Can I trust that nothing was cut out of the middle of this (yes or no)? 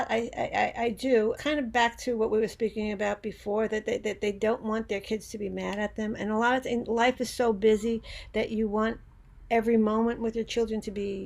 no